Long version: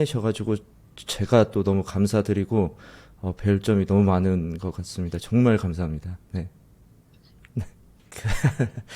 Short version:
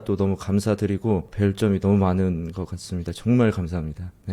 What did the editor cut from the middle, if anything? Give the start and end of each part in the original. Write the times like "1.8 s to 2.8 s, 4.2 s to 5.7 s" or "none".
2.8 s to 3.4 s